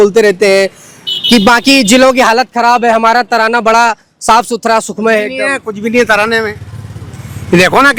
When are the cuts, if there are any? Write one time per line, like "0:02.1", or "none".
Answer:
none